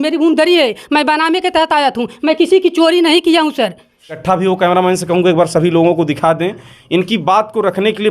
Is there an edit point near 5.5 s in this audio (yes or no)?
no